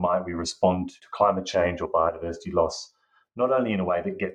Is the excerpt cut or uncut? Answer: cut